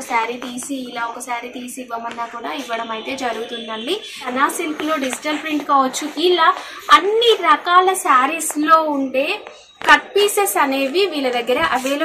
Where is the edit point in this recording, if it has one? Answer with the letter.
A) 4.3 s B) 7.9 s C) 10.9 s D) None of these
A